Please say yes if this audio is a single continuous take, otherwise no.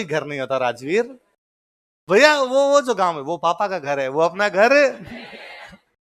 yes